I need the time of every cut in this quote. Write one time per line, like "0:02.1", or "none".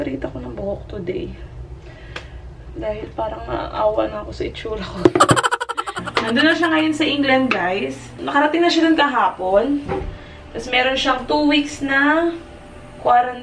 0:06.1